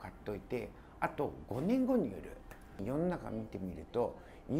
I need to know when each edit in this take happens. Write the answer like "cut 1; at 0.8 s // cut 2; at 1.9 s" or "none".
cut 1; at 2.8 s